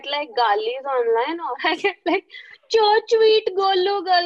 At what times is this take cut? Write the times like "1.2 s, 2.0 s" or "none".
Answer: none